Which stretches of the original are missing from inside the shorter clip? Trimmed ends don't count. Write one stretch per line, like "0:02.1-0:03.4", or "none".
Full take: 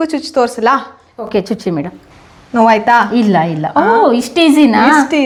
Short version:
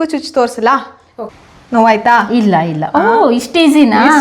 0:01.2-0:02.0